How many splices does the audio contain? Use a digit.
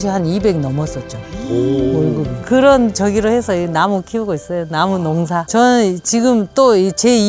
1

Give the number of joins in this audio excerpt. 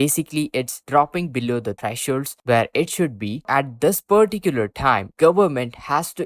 2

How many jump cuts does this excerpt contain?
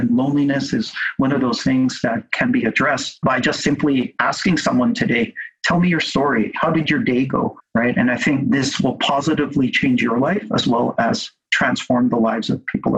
2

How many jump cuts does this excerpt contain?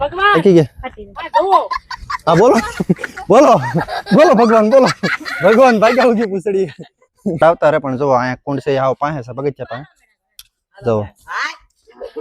1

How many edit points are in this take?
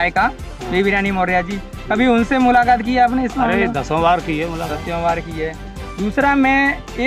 0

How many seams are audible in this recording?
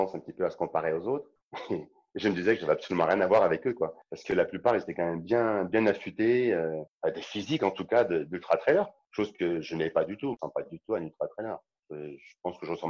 4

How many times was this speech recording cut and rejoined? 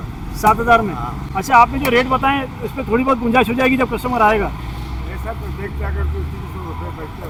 0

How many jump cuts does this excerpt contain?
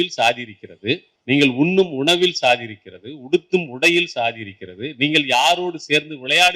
1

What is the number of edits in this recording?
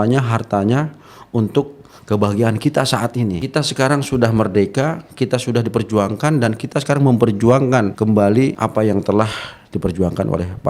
3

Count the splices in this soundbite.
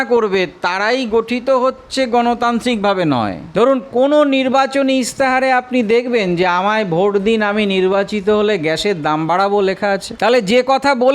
2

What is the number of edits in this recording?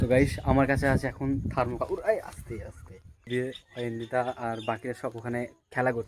1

